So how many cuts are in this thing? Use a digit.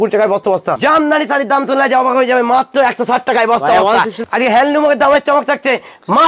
2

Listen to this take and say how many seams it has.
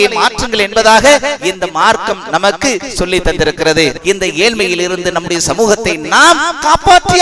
1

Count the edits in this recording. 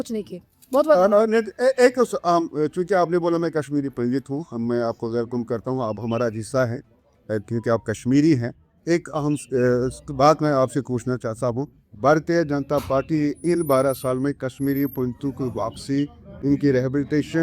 1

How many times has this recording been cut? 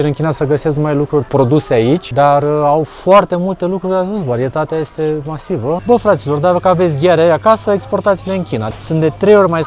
4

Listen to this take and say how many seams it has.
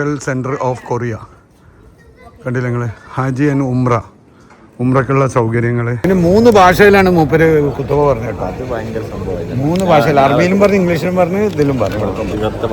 1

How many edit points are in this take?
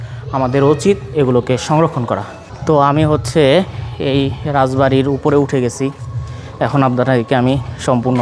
0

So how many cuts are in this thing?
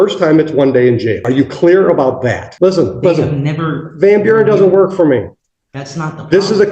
2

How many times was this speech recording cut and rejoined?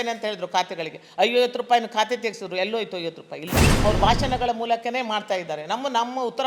1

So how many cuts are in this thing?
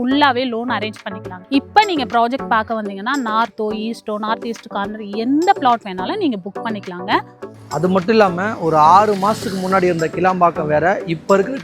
2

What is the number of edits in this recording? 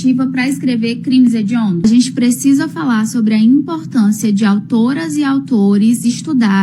1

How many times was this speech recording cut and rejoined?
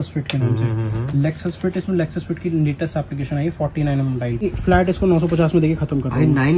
1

